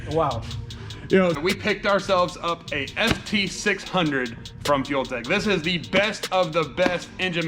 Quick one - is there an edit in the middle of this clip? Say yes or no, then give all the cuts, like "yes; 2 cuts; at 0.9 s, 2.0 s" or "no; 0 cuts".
yes; 1 cut; at 1.4 s